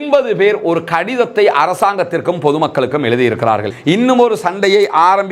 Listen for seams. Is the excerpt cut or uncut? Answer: cut